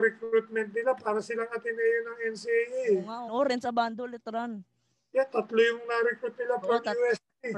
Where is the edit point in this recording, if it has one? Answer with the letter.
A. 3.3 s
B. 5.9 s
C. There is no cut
A